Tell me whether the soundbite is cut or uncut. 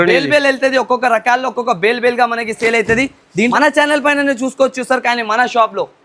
cut